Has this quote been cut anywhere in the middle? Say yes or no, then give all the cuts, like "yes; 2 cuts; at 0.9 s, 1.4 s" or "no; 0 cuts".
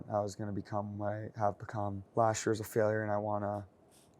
yes; 1 cut; at 2.0 s